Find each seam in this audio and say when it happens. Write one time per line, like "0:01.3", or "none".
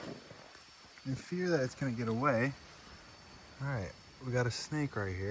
none

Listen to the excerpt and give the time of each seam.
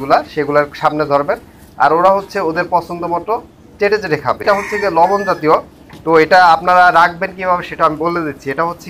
0:04.4

